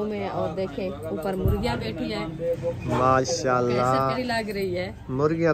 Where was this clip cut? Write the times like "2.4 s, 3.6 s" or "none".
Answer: 4.1 s